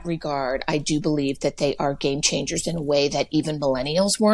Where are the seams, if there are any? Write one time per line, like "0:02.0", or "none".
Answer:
none